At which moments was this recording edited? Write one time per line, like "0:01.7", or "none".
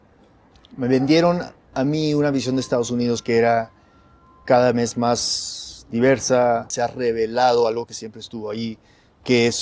0:06.7

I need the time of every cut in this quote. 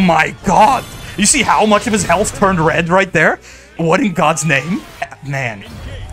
0:03.7
0:05.2

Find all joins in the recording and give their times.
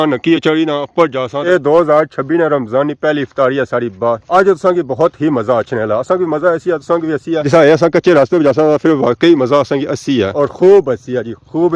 0:01.4
0:04.2

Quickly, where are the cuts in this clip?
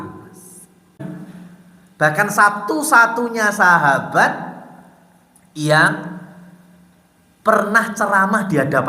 0:01.0

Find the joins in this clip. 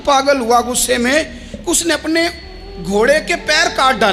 none

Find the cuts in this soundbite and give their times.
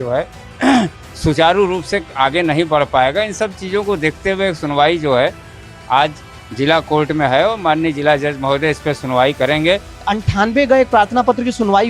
0:10.1

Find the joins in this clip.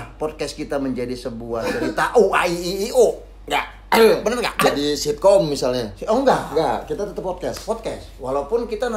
none

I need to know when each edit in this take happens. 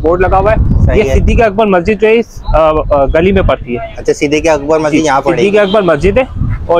none

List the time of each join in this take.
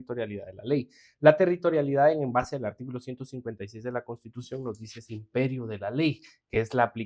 none

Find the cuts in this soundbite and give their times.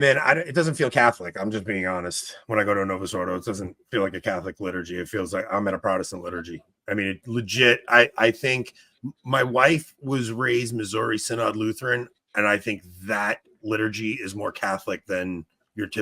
none

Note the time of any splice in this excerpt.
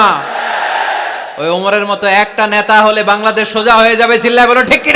0:01.2

